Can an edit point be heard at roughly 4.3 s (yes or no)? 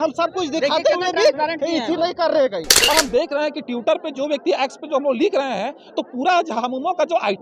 no